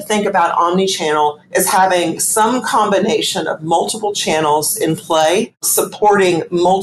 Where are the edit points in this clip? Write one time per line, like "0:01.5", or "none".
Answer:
0:05.6